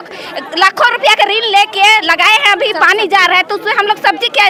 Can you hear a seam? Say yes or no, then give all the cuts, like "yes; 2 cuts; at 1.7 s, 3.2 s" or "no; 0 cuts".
no; 0 cuts